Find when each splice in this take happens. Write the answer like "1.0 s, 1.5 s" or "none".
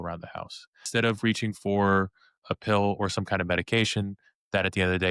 0.9 s, 2.4 s